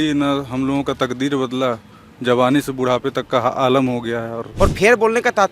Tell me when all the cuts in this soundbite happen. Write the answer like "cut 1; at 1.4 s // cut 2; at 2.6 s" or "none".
cut 1; at 4.5 s